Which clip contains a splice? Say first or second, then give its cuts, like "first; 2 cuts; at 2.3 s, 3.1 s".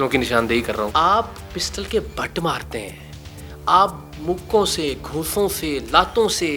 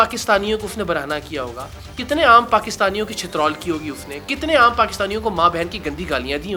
first; 1 cut; at 0.9 s